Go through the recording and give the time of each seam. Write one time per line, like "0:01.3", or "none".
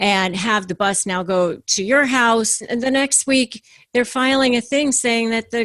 0:02.7